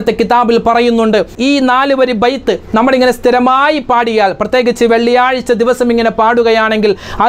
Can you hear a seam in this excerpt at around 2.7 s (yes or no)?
no